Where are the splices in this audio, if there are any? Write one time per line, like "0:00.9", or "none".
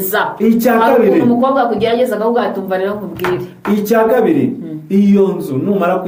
none

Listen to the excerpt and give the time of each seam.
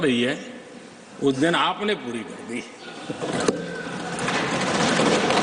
none

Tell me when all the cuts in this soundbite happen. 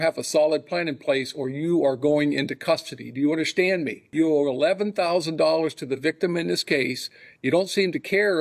0:04.0

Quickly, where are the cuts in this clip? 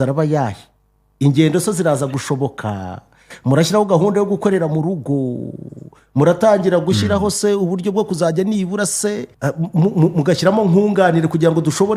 0:09.3

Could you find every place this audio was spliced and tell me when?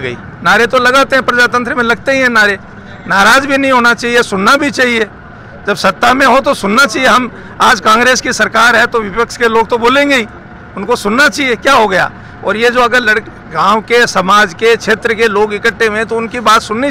none

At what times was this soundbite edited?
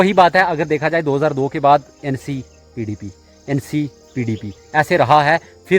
none

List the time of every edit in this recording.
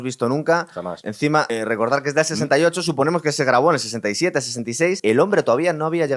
0:01.2
0:05.0

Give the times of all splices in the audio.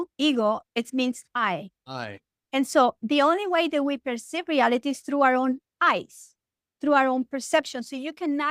none

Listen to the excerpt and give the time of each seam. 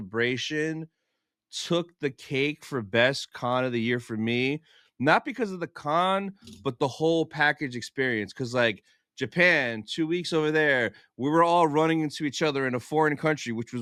none

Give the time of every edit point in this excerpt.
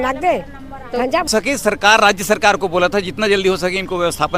0:01.3

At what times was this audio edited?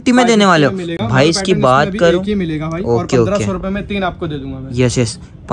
none

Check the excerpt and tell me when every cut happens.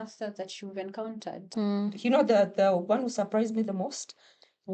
0:01.5

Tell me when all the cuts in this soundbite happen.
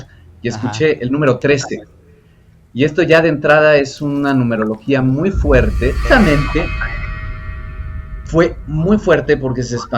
0:06.0

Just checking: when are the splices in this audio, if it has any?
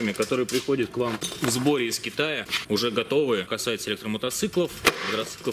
0:01.3
0:02.5
0:03.5

